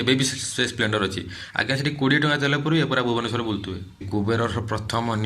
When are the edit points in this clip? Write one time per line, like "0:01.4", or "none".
0:04.1